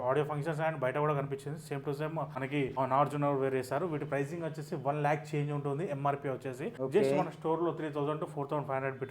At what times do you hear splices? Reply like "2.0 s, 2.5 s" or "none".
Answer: 2.6 s, 6.7 s

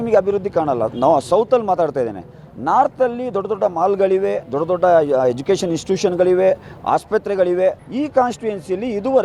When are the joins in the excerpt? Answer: 7.8 s

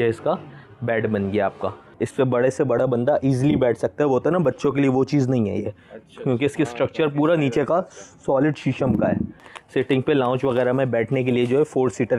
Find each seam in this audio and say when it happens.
2.0 s, 9.5 s

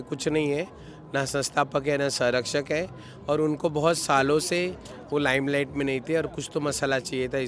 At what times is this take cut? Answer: none

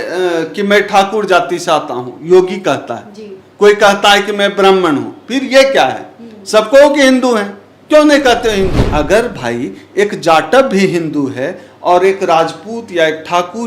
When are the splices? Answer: 8.8 s

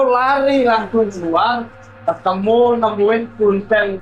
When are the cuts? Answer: none

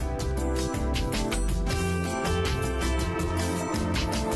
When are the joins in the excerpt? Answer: none

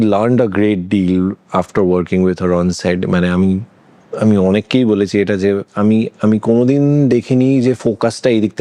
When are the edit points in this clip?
none

